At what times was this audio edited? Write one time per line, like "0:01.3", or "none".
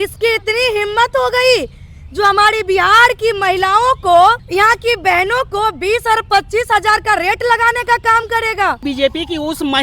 0:04.4
0:08.8